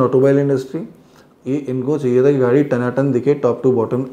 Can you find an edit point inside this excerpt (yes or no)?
yes